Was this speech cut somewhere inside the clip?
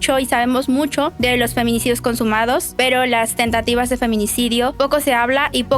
yes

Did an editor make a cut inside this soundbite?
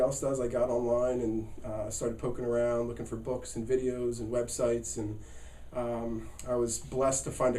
no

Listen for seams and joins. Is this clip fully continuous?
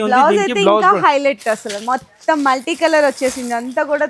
yes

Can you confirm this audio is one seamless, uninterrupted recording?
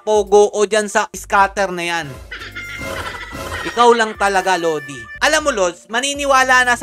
yes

